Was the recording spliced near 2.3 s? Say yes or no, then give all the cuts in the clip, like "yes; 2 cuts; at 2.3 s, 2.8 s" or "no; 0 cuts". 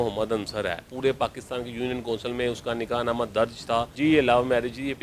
no; 2 cuts; at 0.9 s, 3.9 s